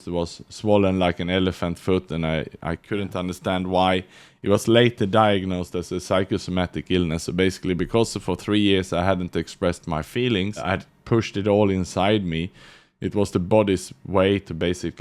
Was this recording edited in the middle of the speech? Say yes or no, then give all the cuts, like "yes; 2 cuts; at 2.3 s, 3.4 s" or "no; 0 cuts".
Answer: yes; 1 cut; at 10.9 s